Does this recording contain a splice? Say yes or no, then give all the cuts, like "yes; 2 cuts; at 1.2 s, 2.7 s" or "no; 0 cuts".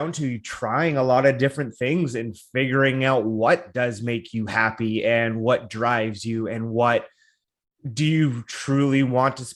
no; 0 cuts